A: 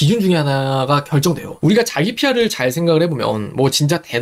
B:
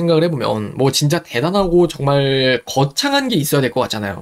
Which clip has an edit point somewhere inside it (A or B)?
A